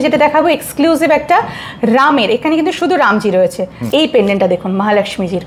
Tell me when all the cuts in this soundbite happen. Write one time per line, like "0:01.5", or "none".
0:03.7